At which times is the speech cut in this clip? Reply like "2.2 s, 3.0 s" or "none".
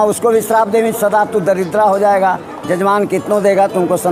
none